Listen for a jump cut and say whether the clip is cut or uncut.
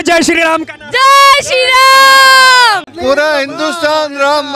cut